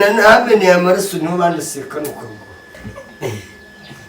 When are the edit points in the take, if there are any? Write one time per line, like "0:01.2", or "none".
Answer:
0:02.7